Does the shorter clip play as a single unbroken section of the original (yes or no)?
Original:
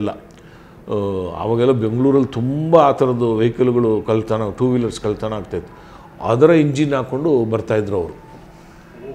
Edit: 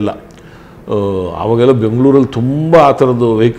yes